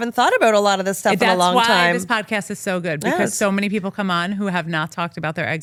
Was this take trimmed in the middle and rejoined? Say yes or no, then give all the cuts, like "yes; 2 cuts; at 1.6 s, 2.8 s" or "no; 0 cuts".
no; 0 cuts